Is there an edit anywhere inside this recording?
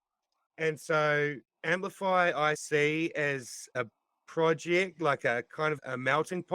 yes; 1 cut; at 2.6 s

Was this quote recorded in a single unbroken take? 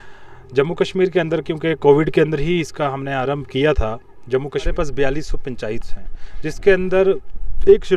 no; 1 cut; at 4.7 s

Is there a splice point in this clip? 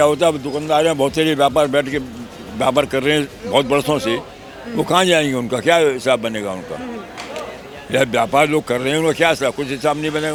no; 0 cuts

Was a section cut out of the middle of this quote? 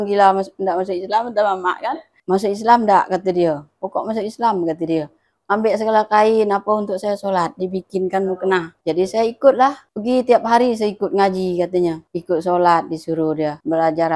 yes; 1 cut; at 2.2 s

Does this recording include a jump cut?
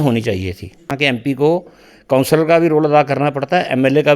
yes; 1 cut; at 1.2 s

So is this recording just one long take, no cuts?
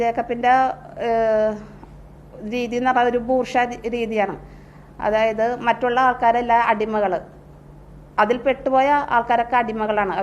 yes; 0 cuts

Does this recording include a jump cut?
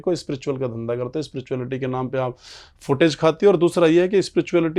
no; 0 cuts

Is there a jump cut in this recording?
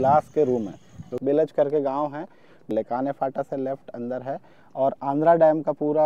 yes; 2 cuts; at 1.1 s, 2.7 s

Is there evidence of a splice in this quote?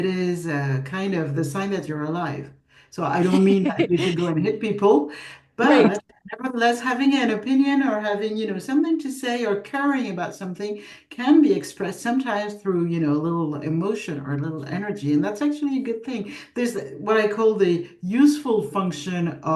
no; 0 cuts

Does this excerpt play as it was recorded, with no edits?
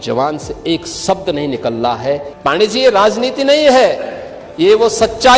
no; 1 cut; at 2.3 s

